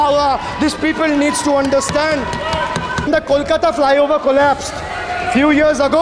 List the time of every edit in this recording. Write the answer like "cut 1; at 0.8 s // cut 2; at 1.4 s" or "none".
cut 1; at 3.1 s